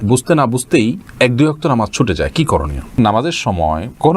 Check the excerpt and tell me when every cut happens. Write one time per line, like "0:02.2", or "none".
0:03.0